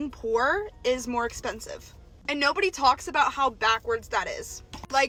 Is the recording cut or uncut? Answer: uncut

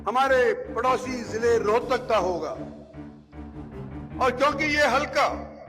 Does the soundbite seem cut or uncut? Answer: cut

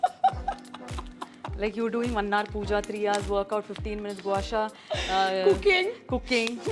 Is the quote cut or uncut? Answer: uncut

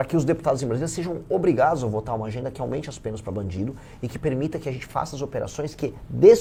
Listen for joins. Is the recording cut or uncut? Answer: uncut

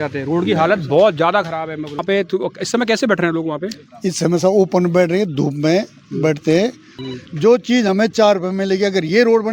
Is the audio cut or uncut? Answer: cut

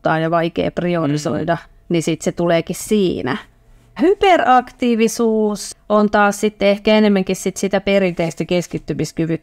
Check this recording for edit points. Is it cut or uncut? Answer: cut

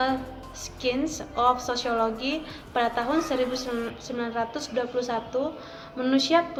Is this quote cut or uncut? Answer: uncut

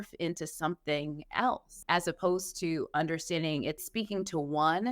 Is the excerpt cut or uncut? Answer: cut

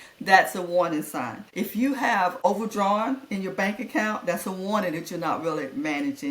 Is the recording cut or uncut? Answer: cut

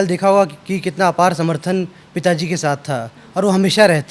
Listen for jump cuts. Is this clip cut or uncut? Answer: uncut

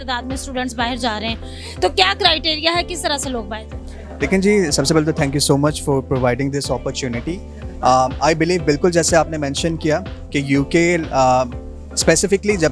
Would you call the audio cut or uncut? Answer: uncut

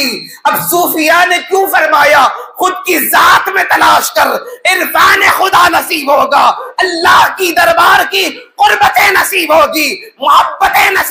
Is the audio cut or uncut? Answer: uncut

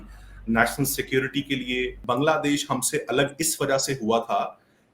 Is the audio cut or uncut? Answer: cut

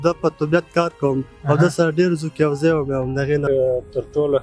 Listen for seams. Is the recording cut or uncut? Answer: cut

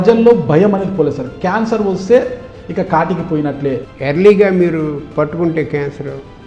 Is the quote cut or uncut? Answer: cut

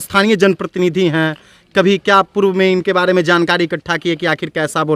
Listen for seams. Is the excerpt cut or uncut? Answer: uncut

